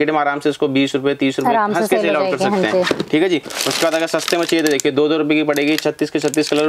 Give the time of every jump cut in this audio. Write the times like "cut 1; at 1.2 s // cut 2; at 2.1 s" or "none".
none